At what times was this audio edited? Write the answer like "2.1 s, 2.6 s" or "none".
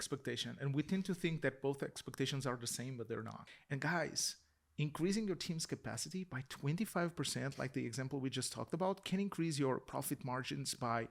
3.4 s